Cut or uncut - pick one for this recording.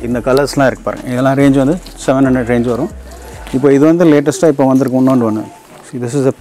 uncut